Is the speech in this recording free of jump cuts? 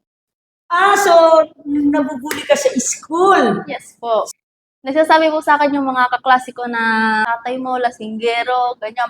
no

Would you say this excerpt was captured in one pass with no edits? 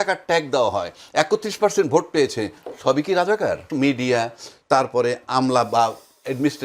no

